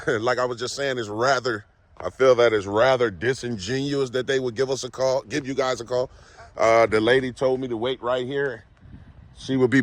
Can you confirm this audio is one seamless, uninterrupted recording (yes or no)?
yes